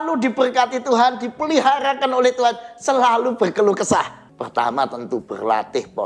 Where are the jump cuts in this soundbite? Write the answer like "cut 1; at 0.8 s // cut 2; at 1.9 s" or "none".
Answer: cut 1; at 4.2 s